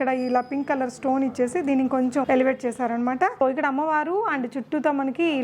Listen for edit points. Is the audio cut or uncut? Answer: cut